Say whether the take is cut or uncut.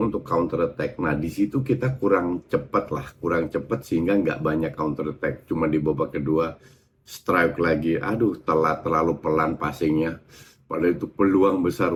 uncut